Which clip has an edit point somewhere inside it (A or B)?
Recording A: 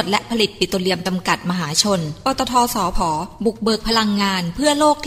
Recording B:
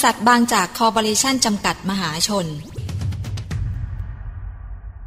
B